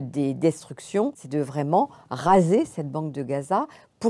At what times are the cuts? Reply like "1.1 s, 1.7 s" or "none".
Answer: 1.2 s